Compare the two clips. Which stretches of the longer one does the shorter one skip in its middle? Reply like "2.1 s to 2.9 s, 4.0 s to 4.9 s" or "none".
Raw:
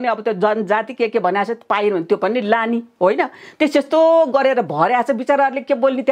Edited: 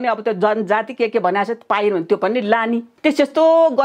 2.9 s to 3.4 s